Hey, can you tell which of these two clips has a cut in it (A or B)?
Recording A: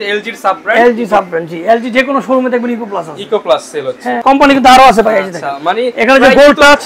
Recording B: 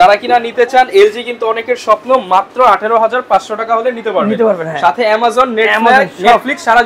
A